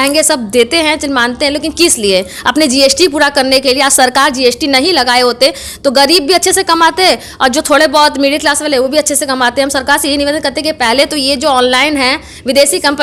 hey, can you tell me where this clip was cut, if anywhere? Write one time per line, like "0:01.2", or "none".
none